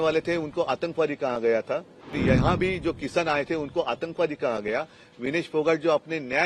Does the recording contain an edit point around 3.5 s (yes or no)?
no